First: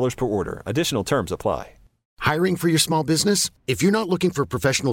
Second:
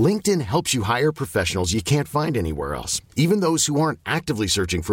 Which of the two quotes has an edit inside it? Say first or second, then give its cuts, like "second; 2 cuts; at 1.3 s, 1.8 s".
first; 1 cut; at 2.0 s